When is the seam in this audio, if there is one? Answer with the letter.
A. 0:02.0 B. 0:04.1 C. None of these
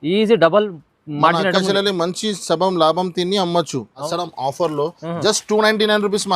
B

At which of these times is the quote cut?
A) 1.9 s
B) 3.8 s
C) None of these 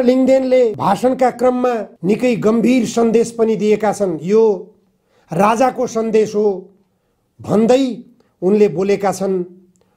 A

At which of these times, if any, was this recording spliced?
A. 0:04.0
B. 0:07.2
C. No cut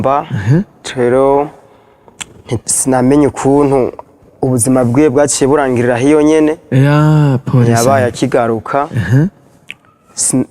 C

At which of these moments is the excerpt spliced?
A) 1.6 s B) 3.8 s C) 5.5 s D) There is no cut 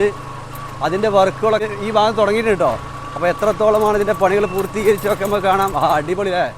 A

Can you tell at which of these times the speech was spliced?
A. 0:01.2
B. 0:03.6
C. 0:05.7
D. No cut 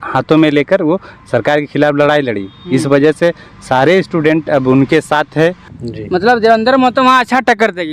C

